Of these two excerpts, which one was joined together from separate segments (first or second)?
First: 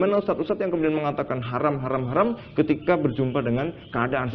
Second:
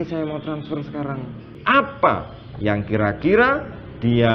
second